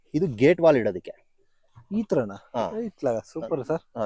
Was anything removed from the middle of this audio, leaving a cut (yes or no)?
no